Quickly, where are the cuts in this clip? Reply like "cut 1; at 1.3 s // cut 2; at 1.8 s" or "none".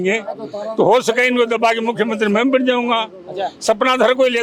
none